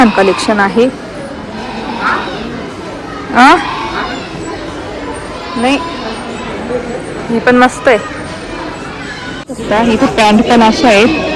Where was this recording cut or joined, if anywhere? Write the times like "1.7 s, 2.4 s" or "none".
9.3 s